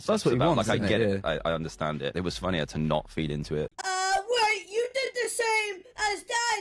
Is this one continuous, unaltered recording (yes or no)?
no